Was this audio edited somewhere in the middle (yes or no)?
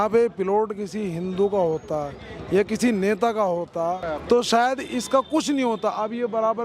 yes